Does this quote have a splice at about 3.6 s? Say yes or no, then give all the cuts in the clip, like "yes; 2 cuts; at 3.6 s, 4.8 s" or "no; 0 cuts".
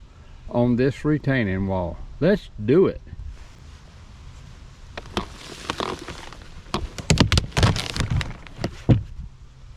yes; 1 cut; at 3.6 s